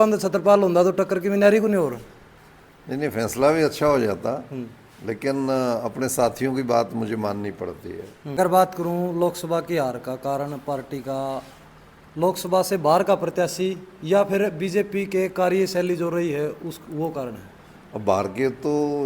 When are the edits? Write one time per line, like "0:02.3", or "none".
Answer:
0:08.4